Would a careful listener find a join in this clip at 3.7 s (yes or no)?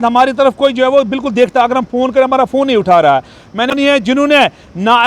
yes